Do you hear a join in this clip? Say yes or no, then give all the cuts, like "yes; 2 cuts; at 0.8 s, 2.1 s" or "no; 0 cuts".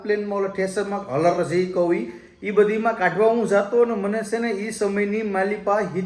no; 0 cuts